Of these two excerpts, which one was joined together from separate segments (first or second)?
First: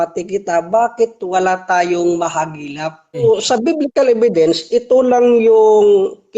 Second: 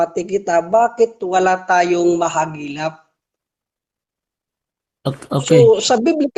first